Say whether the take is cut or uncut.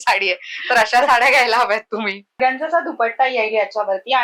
cut